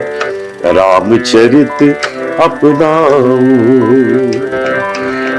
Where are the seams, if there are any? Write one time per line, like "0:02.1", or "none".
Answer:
none